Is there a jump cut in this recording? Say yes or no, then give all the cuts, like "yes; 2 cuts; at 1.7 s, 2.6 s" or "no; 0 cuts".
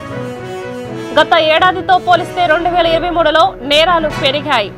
yes; 1 cut; at 1.1 s